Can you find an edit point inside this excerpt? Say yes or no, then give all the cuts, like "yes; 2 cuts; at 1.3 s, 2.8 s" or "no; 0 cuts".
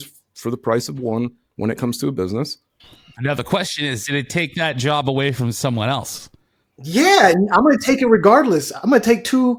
no; 0 cuts